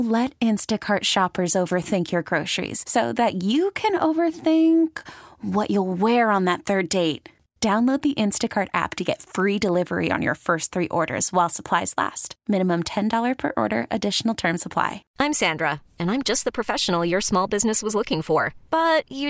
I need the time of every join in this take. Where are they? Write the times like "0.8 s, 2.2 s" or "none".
15.0 s